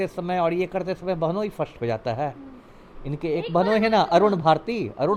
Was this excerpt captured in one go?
yes; 0 cuts

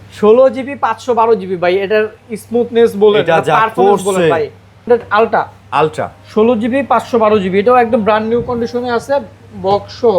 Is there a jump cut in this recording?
yes; 1 cut; at 4.9 s

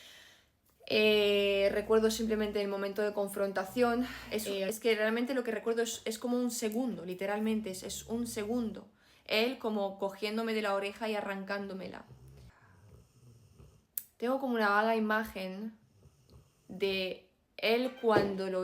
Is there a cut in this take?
yes; 2 cuts; at 4.7 s, 12.5 s

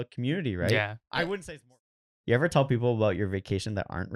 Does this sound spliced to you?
yes; 1 cut; at 1.7 s

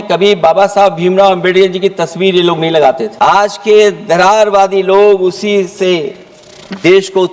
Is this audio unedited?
no; 1 cut; at 3.1 s

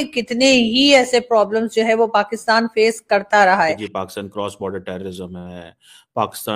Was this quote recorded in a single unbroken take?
no; 1 cut; at 3.9 s

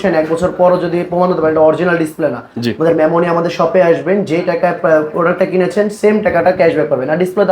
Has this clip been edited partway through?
no; 0 cuts

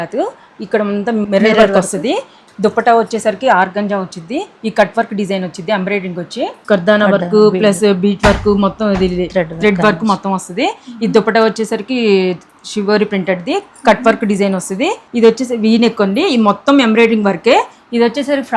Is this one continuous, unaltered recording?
no; 4 cuts; at 1.2 s, 2.4 s, 6.6 s, 15.0 s

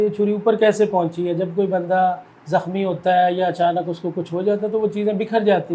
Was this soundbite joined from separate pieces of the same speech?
no; 0 cuts

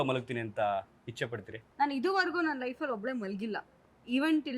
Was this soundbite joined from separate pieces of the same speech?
yes; 1 cut; at 1.6 s

